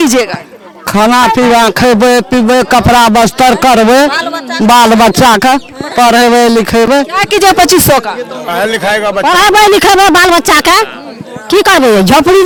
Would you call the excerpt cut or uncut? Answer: uncut